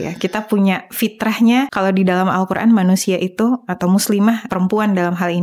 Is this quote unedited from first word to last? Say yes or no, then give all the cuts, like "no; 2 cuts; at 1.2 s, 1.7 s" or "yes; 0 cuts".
no; 2 cuts; at 1.7 s, 4.5 s